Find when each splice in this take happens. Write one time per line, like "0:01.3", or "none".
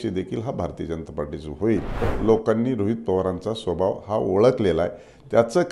0:02.1